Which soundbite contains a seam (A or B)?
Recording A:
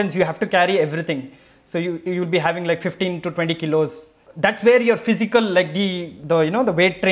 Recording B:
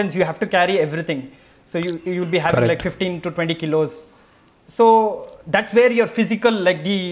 A